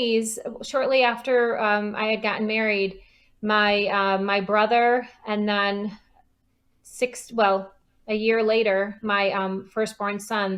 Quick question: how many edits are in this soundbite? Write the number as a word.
zero